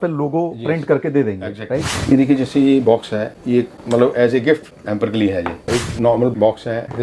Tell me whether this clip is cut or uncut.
cut